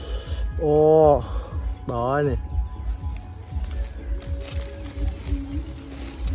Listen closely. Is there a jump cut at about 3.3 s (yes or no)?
no